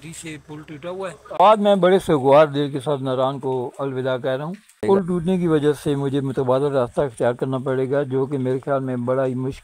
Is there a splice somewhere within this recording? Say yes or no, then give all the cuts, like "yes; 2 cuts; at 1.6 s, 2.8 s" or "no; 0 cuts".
yes; 2 cuts; at 1.4 s, 4.8 s